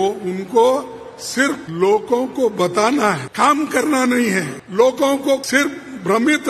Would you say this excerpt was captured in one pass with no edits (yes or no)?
no